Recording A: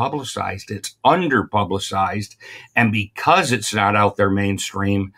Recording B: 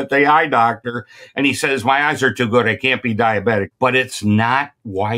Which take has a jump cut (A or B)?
B